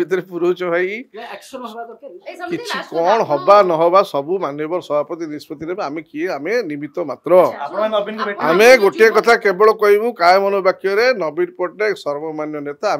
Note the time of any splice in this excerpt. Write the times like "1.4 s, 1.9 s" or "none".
none